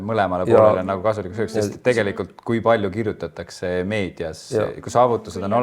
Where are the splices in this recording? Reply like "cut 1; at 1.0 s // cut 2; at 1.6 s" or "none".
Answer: none